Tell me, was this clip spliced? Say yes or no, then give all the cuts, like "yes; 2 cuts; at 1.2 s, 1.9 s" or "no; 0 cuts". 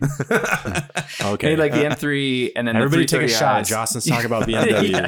no; 0 cuts